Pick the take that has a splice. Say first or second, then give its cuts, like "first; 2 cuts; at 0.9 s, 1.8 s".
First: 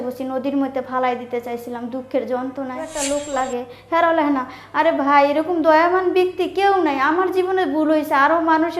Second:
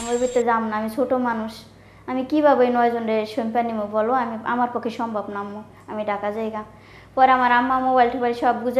first; 1 cut; at 3.0 s